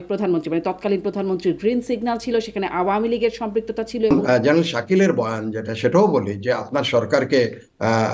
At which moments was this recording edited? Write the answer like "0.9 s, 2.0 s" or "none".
4.1 s